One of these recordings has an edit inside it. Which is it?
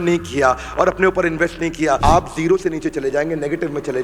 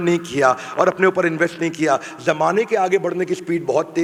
first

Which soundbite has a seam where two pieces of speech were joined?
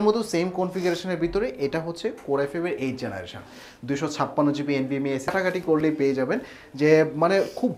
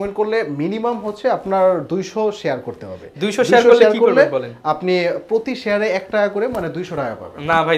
first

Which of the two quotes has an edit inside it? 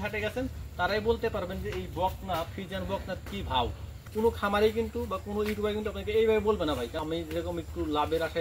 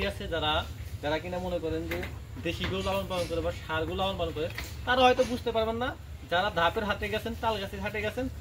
first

